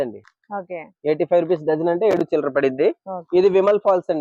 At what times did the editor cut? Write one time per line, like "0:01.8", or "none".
none

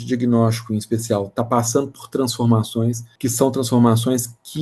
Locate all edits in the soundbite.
0:03.1

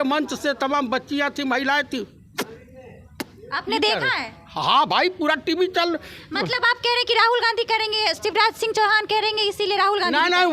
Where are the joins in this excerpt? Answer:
none

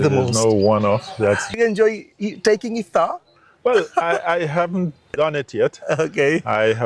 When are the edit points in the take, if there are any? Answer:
0:01.5
0:05.1

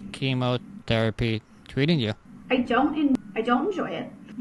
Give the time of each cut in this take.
0:03.2

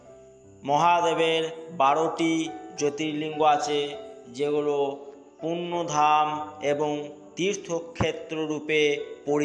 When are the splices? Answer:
none

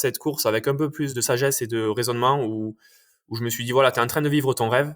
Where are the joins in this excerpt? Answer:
0:01.1

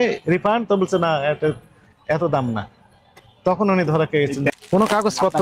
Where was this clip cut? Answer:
0:04.5

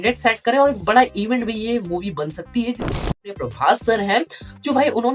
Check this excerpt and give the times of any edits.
0:03.1

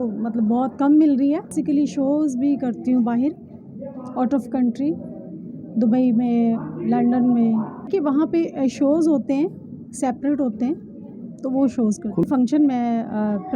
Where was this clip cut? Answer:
0:01.6
0:07.9
0:12.2

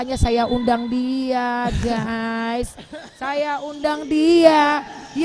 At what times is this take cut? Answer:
none

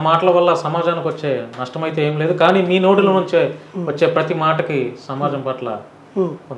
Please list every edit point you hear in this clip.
none

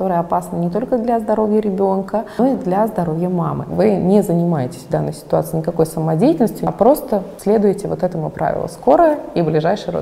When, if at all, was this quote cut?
0:02.4
0:03.7
0:06.6

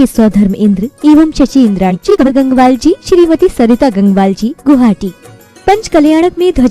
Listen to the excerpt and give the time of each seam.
0:02.3

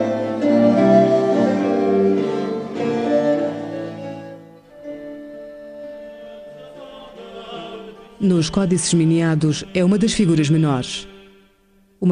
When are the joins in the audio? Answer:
0:03.8

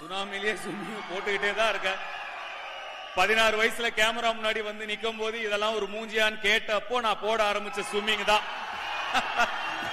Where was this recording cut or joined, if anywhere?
none

